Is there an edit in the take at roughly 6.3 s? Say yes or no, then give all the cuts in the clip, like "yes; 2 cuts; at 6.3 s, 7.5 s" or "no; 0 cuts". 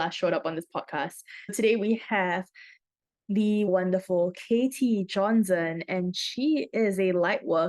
no; 2 cuts; at 1.5 s, 3.7 s